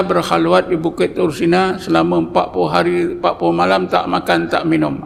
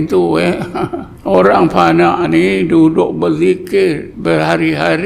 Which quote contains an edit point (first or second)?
second